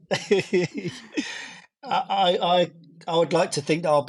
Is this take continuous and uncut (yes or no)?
yes